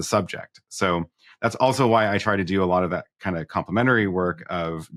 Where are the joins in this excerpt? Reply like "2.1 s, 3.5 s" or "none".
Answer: none